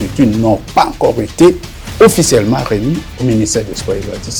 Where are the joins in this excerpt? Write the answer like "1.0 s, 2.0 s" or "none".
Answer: none